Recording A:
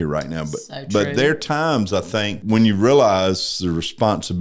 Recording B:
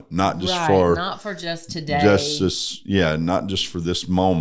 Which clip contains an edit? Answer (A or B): A